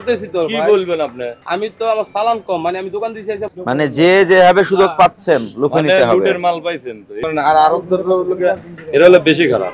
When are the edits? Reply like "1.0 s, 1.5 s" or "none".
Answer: 3.5 s